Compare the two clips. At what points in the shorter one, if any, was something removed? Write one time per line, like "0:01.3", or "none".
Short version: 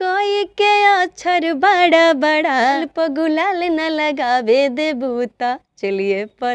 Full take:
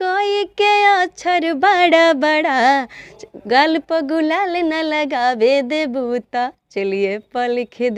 0:02.9